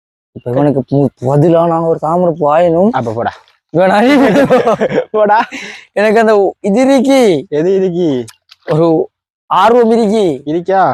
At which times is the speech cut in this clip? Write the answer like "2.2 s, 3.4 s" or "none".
none